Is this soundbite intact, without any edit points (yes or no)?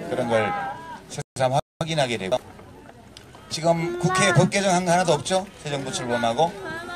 no